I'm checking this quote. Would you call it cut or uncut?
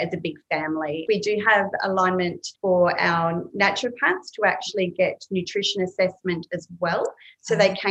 cut